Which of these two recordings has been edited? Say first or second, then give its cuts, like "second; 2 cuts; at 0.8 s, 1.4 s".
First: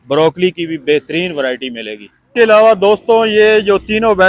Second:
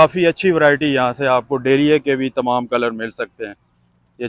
first; 1 cut; at 2.3 s